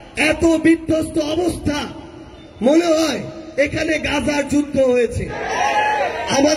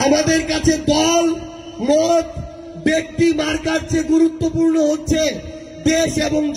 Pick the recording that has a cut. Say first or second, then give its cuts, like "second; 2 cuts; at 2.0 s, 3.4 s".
first; 1 cut; at 5.3 s